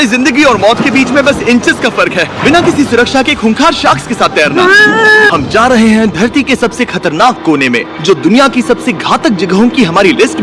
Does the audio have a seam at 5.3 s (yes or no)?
yes